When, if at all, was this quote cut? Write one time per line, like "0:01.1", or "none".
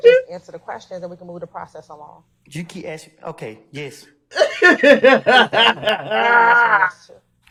none